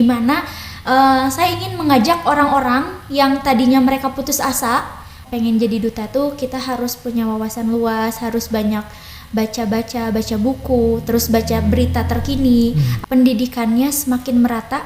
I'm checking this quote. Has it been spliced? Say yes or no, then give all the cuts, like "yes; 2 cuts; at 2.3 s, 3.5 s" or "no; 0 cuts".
yes; 2 cuts; at 5.2 s, 12.9 s